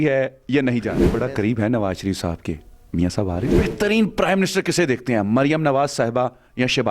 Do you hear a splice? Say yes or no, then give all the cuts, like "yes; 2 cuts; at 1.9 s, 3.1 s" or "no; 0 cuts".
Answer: yes; 2 cuts; at 1.1 s, 3.6 s